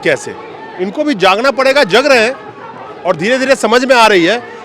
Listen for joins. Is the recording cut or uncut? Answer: uncut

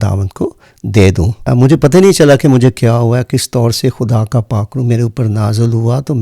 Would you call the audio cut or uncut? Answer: cut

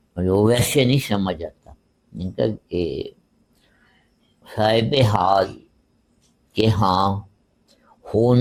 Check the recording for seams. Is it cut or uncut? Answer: uncut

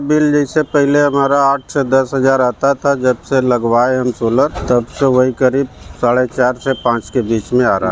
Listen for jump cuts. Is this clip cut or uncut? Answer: cut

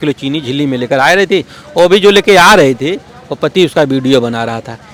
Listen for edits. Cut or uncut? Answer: uncut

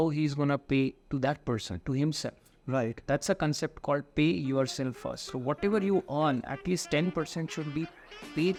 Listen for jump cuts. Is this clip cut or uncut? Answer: uncut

